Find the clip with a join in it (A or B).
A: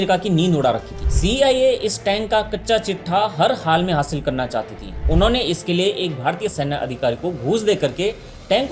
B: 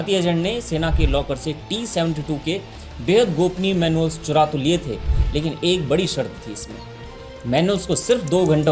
A